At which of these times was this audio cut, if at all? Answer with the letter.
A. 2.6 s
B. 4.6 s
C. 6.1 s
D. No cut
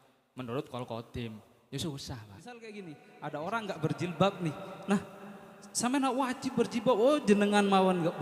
A